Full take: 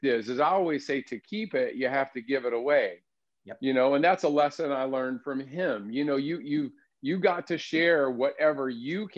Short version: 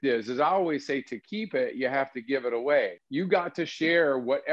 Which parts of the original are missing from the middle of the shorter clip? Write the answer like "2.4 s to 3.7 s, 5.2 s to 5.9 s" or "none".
3.0 s to 6.9 s